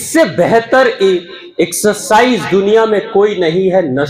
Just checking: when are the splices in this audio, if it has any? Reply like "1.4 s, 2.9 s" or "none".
none